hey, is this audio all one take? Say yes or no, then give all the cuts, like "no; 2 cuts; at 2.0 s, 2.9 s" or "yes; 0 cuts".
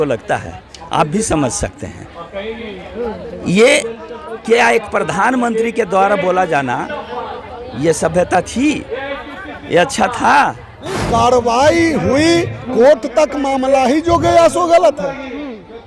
no; 1 cut; at 11.0 s